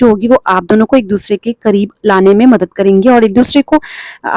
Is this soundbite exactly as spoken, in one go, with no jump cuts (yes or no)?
yes